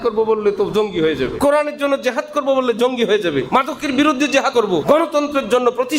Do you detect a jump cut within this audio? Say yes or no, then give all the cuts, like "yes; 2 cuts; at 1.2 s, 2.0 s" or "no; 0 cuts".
yes; 3 cuts; at 1.3 s, 3.5 s, 4.6 s